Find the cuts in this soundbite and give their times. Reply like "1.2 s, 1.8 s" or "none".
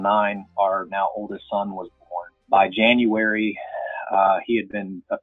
2.3 s